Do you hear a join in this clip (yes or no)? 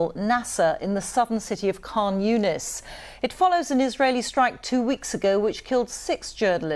no